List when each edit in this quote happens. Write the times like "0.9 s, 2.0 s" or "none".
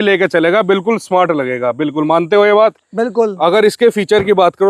none